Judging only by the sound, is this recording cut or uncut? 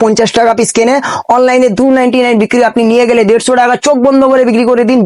uncut